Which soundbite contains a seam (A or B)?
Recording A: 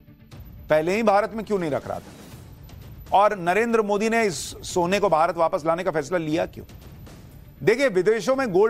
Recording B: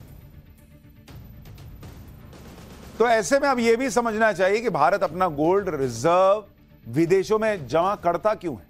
A